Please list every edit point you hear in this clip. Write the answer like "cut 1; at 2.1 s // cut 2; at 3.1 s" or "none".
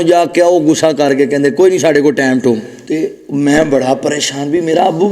cut 1; at 2.7 s